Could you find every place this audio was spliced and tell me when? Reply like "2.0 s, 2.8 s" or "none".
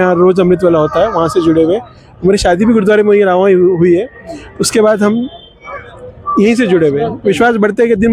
none